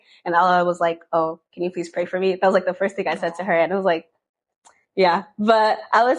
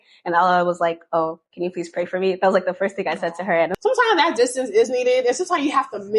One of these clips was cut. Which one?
second; 1 cut; at 3.7 s

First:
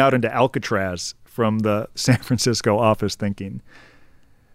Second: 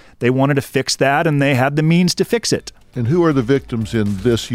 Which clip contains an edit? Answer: second; 1 cut; at 2.9 s

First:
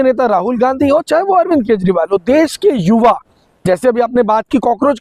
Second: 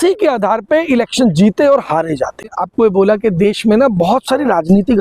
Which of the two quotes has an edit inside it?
second; 1 cut; at 2.4 s

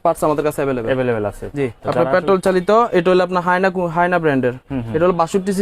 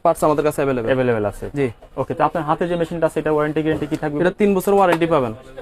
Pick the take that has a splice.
first; 1 cut; at 1.8 s

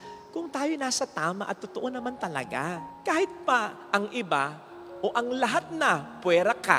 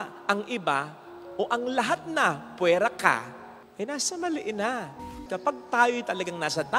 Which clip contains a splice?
second; 1 cut; at 5.1 s

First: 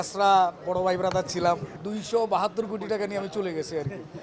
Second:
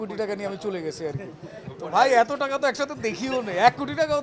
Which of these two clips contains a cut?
first; 1 cut; at 1.7 s

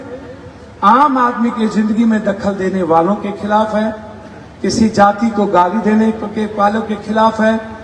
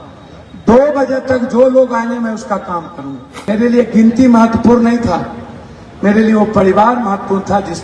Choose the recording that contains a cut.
second; 1 cut; at 3.3 s

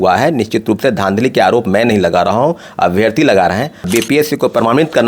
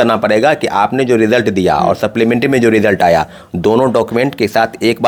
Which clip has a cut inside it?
first; 1 cut; at 3.9 s

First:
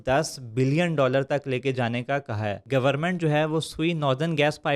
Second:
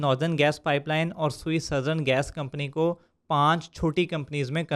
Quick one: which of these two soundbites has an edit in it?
first; 1 cut; at 2.6 s

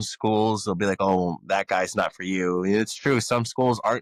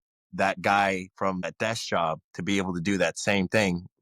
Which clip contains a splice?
second; 1 cut; at 1.5 s

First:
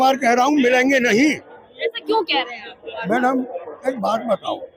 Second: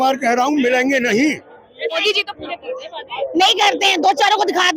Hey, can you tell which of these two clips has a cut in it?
second; 1 cut; at 2.0 s

